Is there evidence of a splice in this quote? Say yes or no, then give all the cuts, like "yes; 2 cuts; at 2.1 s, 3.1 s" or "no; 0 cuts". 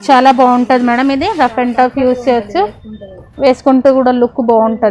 no; 0 cuts